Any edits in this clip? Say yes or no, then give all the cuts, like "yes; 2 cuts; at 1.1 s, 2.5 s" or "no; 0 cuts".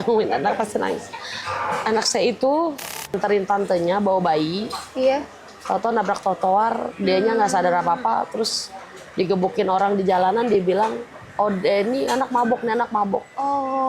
yes; 1 cut; at 3.2 s